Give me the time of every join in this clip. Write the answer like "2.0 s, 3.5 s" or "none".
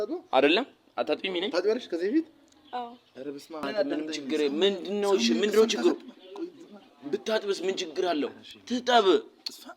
3.6 s